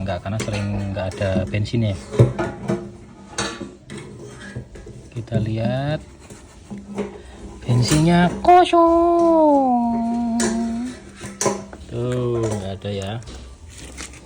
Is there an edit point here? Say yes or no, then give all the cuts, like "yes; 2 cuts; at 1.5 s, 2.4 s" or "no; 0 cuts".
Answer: no; 0 cuts